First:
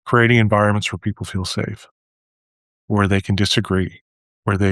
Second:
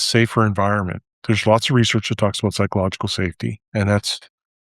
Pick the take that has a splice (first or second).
second